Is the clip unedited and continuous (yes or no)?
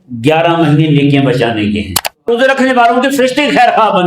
no